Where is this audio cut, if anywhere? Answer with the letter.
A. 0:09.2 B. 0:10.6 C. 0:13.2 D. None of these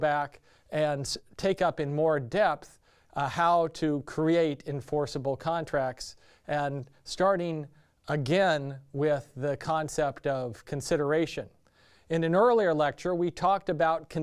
C